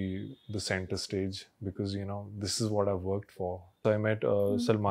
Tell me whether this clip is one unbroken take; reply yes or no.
no